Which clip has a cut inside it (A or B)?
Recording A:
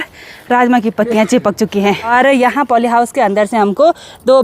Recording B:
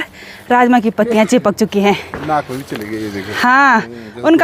A